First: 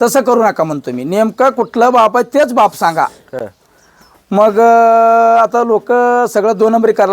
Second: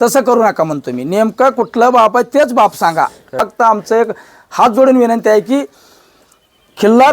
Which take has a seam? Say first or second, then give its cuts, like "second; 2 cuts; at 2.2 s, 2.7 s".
second; 1 cut; at 3.3 s